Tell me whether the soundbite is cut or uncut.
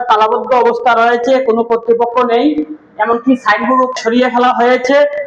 uncut